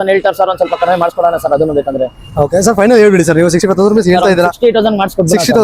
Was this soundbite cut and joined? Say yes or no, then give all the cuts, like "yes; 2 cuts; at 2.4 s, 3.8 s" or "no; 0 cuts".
no; 0 cuts